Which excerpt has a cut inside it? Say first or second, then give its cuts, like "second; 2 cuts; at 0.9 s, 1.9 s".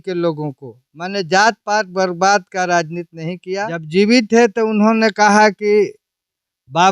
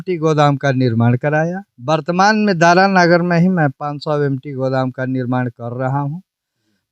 first; 1 cut; at 3.8 s